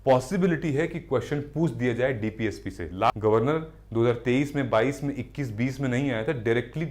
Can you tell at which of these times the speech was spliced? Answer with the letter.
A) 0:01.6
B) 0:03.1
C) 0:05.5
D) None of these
B